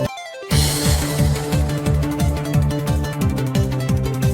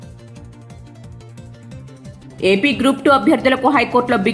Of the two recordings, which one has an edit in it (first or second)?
second